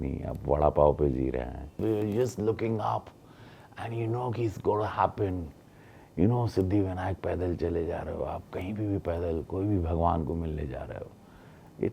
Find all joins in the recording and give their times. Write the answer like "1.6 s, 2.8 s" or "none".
1.8 s